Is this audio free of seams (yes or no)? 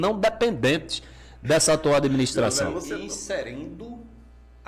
no